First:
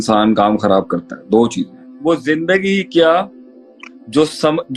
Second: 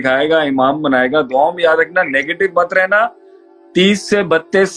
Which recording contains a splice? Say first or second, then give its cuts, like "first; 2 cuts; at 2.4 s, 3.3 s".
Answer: first; 1 cut; at 2.0 s